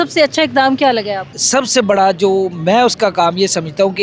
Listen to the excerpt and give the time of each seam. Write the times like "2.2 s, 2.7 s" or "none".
1.2 s

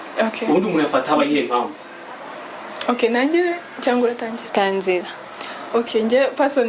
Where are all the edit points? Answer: none

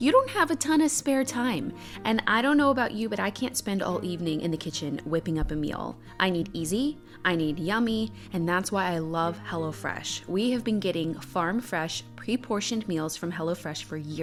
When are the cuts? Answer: none

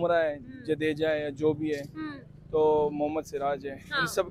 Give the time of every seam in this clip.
none

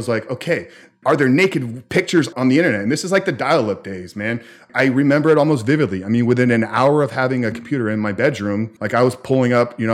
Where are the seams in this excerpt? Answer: 8.8 s

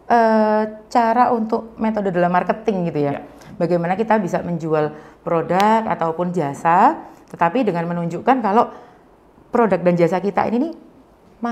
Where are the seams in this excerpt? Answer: none

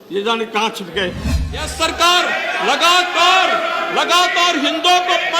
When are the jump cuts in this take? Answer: 1.7 s

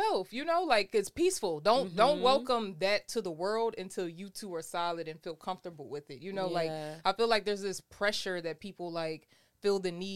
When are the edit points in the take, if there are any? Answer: none

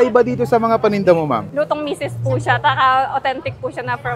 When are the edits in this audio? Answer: 1.5 s

